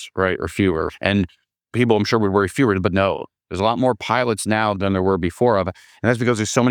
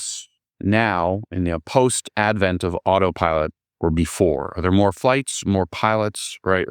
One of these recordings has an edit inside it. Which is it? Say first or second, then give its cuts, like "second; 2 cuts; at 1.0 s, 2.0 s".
second; 1 cut; at 5.0 s